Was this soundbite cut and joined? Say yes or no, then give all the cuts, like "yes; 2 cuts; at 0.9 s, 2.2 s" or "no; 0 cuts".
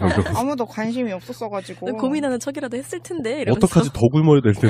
no; 0 cuts